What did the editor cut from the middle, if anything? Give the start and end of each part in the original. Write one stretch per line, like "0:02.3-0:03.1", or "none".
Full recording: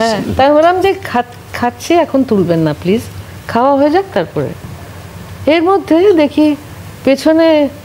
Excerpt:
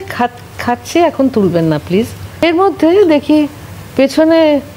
0:03.4-0:05.5